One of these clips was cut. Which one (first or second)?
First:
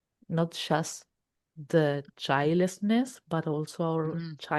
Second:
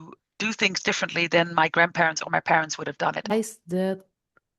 second